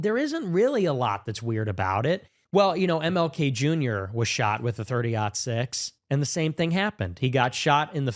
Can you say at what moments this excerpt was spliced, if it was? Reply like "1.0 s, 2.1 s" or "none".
2.3 s

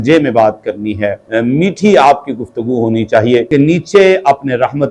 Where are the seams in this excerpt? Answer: 1.3 s, 3.5 s

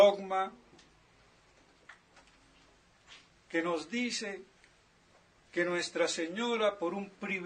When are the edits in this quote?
none

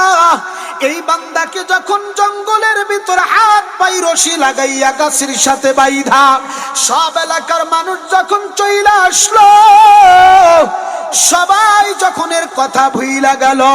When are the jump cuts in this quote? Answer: 2.1 s

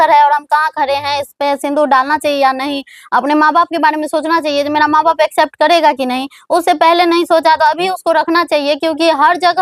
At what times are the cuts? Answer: none

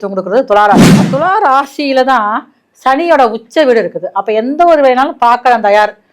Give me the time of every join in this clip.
1.0 s

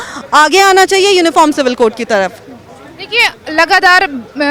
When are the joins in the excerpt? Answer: none

